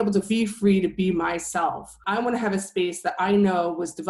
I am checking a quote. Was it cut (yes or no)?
no